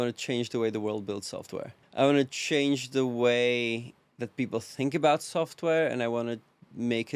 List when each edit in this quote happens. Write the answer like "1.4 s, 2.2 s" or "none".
1.8 s